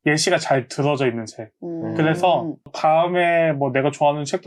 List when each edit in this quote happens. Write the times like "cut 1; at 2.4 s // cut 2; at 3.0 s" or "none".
none